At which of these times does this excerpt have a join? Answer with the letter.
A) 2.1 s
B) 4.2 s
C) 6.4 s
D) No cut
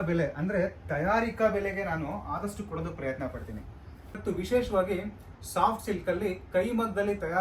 B